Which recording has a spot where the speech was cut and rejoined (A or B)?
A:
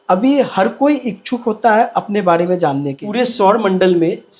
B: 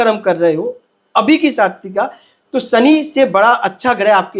A